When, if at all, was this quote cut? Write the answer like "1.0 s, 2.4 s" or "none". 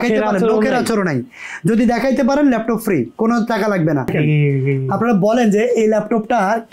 4.1 s